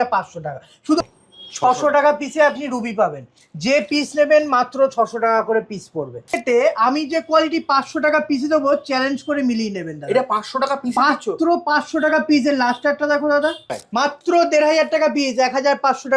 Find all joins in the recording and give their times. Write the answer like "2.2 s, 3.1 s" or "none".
1.0 s, 6.4 s, 13.8 s